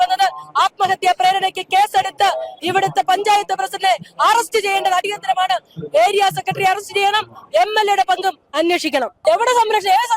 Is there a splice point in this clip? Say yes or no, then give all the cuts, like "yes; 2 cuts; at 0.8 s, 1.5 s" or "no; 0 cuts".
yes; 1 cut; at 9.2 s